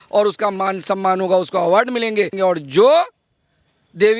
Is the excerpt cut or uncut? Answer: cut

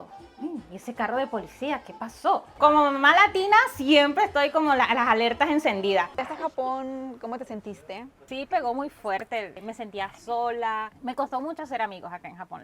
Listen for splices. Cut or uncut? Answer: cut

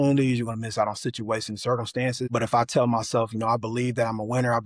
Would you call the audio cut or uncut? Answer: cut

